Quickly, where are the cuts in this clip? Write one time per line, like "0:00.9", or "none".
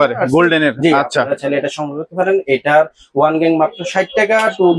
none